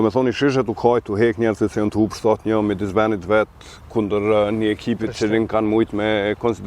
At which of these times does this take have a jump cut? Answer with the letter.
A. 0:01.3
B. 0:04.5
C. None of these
C